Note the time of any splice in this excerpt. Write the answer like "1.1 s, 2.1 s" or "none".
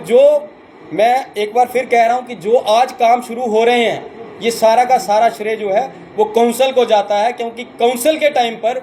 none